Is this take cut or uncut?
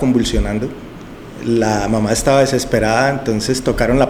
uncut